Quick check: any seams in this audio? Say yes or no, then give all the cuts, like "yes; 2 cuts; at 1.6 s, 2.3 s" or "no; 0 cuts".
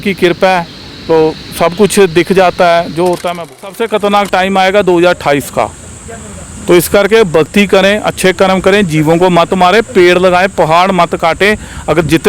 yes; 1 cut; at 3.3 s